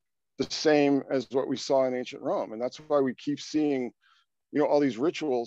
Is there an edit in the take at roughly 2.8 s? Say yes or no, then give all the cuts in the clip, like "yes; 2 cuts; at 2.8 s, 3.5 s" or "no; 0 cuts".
no; 0 cuts